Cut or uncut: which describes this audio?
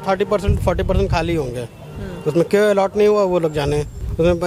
uncut